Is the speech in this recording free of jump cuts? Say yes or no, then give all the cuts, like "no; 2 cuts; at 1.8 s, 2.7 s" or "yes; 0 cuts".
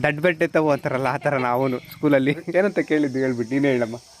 no; 1 cut; at 2.4 s